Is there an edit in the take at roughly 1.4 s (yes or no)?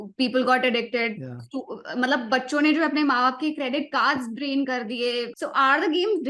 no